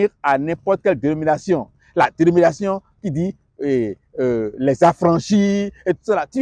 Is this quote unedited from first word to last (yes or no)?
yes